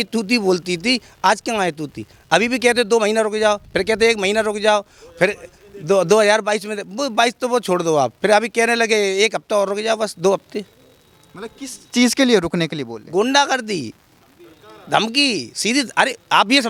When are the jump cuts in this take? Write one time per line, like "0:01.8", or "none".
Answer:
none